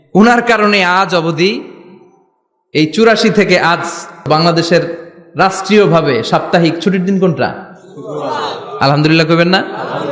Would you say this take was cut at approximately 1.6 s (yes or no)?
no